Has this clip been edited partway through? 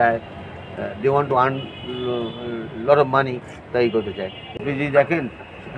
yes; 1 cut; at 4.4 s

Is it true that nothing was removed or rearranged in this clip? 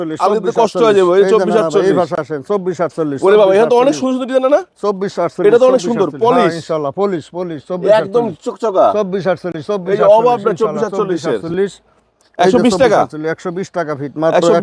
yes; 0 cuts

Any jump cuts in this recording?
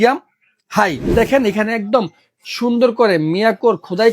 yes; 1 cut; at 1.1 s

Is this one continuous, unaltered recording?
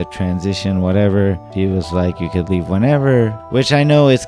no; 1 cut; at 1.4 s

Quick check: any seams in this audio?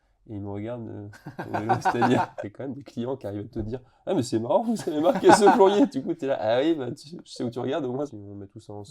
yes; 2 cuts; at 2.4 s, 8.1 s

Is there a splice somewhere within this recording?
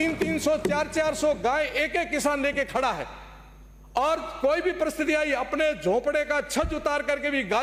no; 0 cuts

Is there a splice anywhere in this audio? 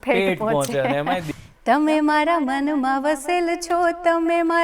yes; 1 cut; at 1.3 s

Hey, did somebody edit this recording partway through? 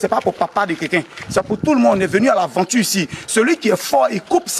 no; 0 cuts

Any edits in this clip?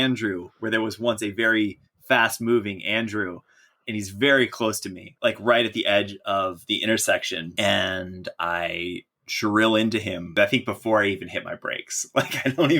yes; 3 cuts; at 5.1 s, 7.5 s, 10.3 s

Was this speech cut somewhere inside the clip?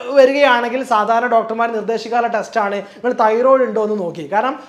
no; 0 cuts

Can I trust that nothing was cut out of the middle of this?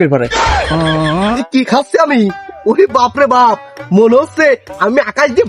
no; 1 cut; at 1.4 s

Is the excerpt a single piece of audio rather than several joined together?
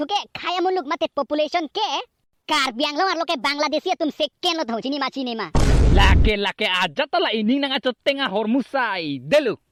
yes; 0 cuts

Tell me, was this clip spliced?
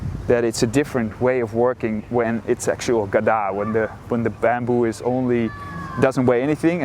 no; 0 cuts

